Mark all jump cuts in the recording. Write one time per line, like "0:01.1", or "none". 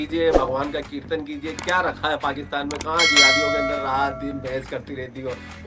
none